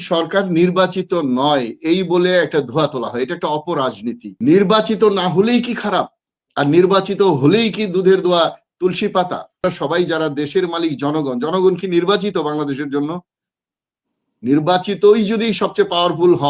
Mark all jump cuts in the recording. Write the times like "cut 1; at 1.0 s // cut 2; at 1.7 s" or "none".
cut 1; at 4.3 s // cut 2; at 9.6 s